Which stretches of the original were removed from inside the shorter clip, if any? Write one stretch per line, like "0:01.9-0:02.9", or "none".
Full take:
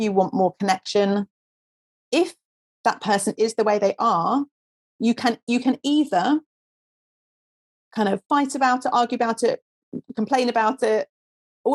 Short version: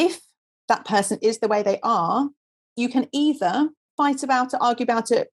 0:04.9-0:05.4
0:06.6-0:08.2